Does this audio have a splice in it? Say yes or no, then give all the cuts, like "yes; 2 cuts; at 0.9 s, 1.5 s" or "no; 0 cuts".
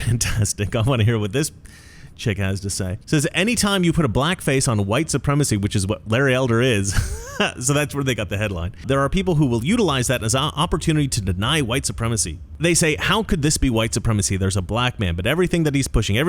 yes; 1 cut; at 3.0 s